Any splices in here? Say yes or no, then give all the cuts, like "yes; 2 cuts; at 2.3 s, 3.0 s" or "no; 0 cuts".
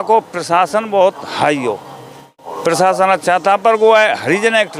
yes; 1 cut; at 2.4 s